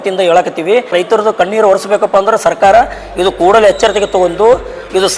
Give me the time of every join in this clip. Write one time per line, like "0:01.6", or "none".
0:00.9